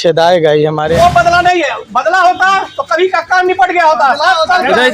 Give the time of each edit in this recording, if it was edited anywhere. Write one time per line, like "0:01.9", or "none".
0:00.9